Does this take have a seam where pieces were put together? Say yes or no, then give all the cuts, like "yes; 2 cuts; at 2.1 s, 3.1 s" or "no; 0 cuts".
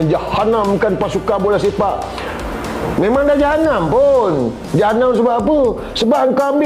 no; 0 cuts